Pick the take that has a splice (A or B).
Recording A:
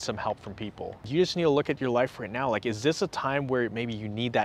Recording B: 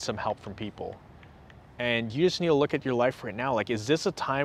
A